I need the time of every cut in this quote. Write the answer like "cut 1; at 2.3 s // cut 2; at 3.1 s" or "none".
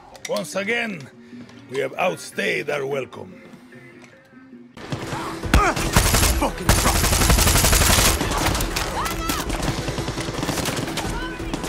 cut 1; at 4.8 s